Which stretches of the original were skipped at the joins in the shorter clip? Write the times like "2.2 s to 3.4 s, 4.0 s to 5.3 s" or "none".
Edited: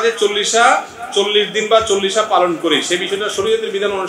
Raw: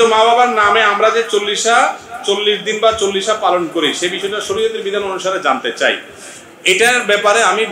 none